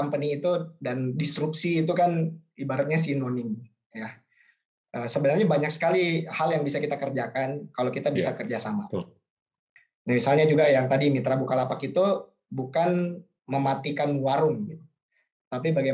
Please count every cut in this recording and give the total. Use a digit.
2